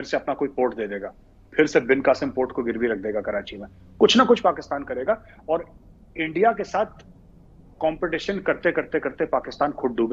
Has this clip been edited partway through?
no; 0 cuts

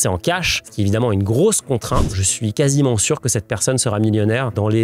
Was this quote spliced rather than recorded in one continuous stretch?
yes; 1 cut; at 2.3 s

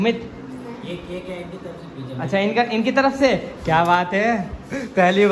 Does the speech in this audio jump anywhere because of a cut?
no; 0 cuts

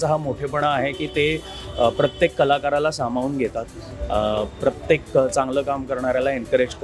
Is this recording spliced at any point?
no; 0 cuts

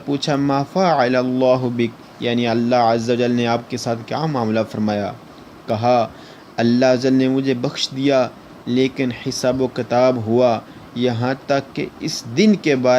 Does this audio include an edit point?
yes; 1 cut; at 1.2 s

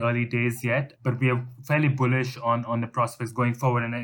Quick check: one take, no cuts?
yes; 0 cuts

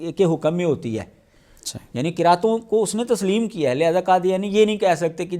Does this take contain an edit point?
no; 0 cuts

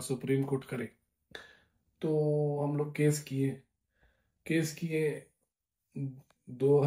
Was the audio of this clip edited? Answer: no; 0 cuts

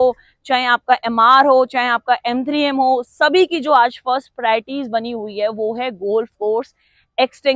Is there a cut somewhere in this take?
no; 0 cuts

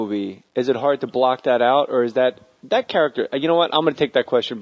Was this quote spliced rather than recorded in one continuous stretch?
no; 0 cuts

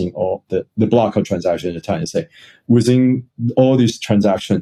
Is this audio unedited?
yes; 0 cuts

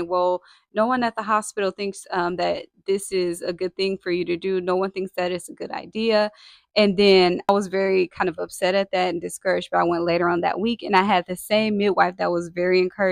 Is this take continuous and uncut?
yes; 0 cuts

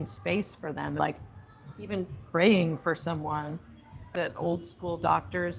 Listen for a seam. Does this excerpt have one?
yes; 2 cuts; at 1.0 s, 4.2 s

